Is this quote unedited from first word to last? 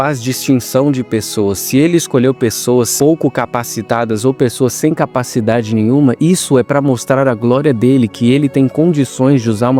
yes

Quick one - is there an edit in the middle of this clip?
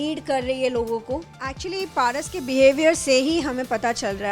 yes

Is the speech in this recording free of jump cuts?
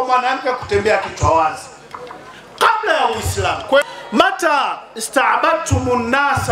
no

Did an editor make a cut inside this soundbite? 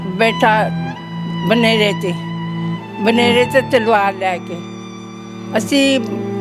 no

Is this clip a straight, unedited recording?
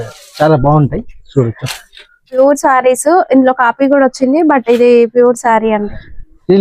no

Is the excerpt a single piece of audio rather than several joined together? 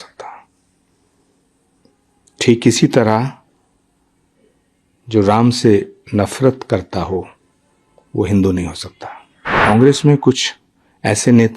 no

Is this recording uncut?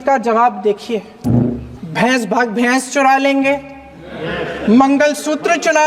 no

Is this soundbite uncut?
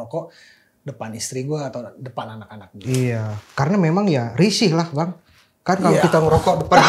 yes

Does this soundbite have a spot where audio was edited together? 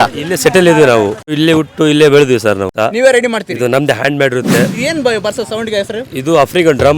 yes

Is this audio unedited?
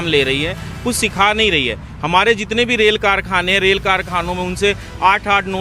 yes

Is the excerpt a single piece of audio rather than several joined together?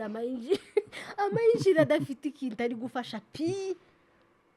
yes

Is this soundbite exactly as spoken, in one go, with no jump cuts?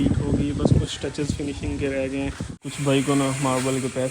no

